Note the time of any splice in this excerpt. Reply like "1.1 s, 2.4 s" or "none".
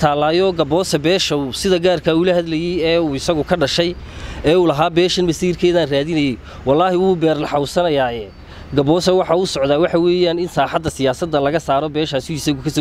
none